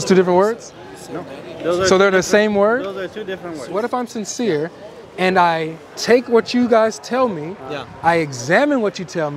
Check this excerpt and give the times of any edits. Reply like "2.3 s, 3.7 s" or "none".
3.8 s